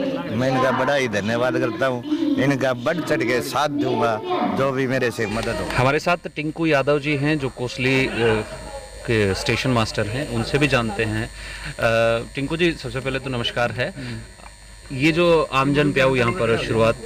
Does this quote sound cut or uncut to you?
uncut